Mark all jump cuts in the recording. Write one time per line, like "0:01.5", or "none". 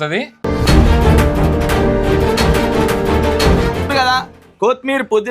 0:03.9